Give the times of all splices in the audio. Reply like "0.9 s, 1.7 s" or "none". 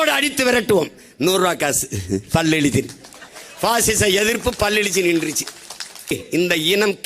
6.1 s